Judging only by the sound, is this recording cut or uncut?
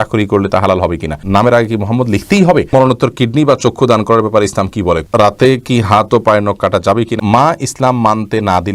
cut